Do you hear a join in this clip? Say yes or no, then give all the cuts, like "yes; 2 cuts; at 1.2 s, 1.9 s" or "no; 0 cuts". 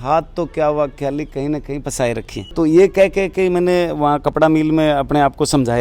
no; 0 cuts